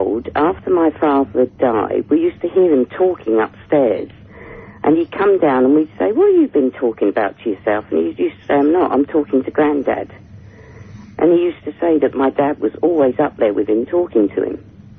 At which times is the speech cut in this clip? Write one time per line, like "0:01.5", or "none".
0:13.3